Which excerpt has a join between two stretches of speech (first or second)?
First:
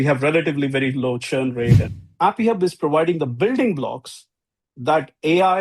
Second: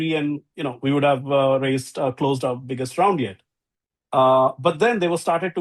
first